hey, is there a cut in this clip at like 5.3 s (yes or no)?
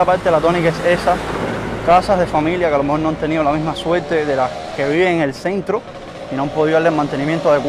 no